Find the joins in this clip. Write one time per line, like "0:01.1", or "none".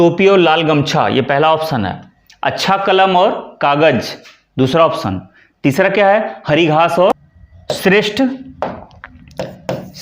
0:07.1